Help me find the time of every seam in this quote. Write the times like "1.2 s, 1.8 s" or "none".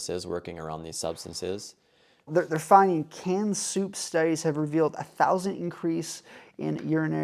2.3 s